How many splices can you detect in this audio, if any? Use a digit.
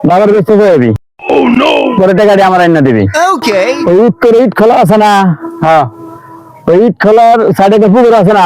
0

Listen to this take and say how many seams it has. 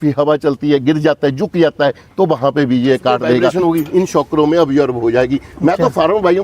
1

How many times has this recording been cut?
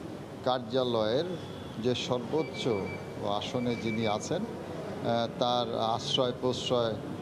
0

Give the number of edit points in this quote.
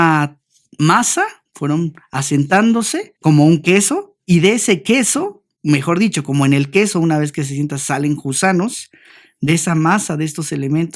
3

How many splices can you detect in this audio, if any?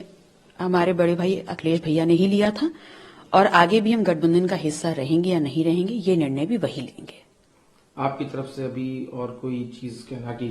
0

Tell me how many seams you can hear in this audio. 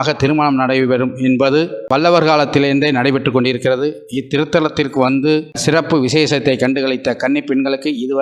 2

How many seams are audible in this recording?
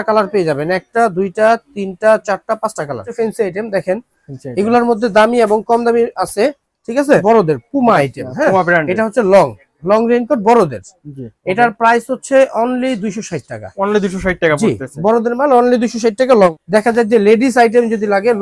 3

